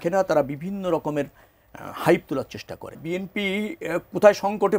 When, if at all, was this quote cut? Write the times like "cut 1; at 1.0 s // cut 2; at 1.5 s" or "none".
cut 1; at 3.0 s